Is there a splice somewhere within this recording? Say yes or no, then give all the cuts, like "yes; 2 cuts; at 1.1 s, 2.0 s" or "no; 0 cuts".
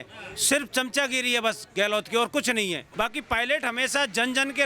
yes; 1 cut; at 2.9 s